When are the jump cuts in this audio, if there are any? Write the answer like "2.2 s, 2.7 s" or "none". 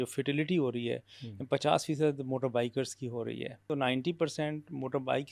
3.7 s